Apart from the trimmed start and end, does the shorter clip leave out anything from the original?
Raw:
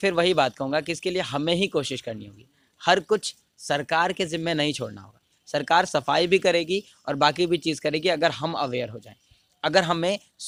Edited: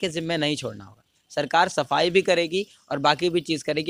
no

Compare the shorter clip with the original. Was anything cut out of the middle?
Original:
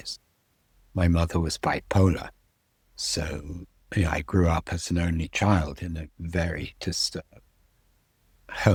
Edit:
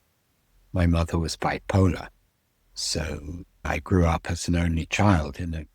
yes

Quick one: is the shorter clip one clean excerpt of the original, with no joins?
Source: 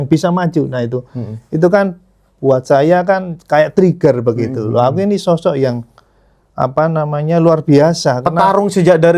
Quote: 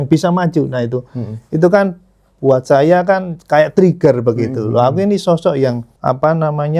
no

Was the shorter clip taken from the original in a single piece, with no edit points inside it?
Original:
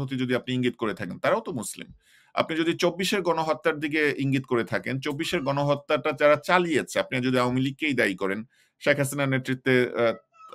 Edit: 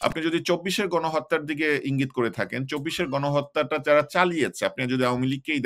yes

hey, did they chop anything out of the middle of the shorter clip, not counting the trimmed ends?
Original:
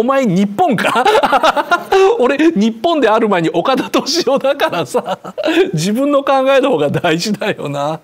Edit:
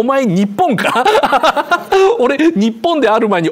no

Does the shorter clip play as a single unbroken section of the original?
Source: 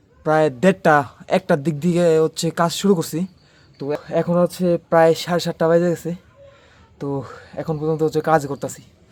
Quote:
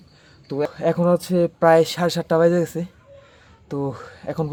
yes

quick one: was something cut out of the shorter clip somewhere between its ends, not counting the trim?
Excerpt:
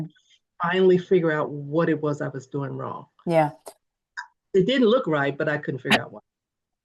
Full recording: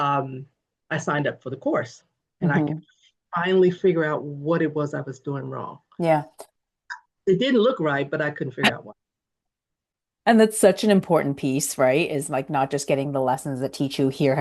no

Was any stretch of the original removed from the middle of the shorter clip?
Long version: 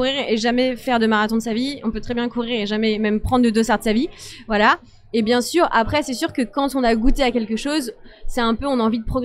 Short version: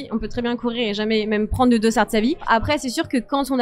yes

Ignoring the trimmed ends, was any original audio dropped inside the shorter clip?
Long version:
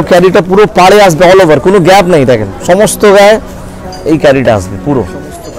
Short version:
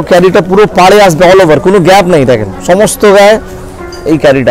no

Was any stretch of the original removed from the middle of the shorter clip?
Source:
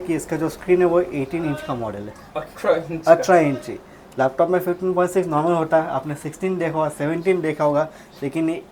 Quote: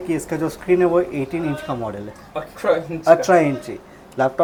no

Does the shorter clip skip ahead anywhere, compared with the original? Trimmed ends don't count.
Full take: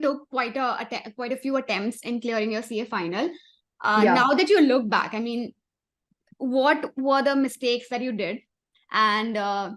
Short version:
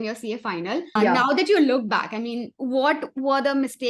yes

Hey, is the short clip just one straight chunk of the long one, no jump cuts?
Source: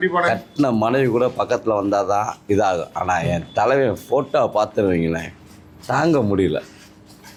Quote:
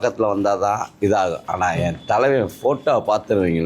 yes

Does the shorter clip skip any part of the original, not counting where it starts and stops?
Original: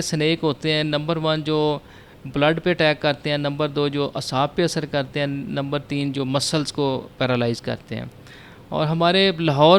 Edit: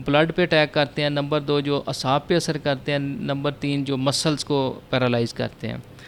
no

